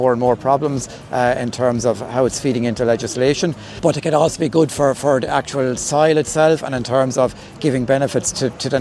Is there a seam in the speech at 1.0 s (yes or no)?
no